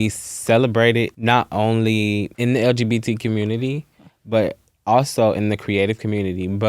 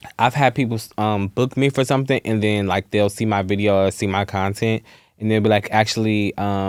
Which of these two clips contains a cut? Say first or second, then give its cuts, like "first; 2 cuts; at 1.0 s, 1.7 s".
first; 2 cuts; at 1.1 s, 2.3 s